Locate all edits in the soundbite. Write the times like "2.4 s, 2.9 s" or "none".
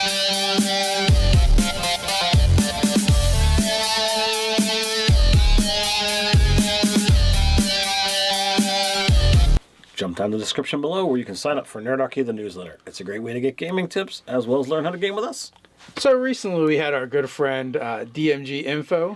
16.7 s